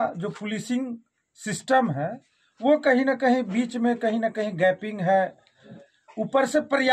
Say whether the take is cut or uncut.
uncut